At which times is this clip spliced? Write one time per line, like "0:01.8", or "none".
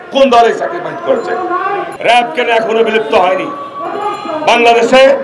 0:01.9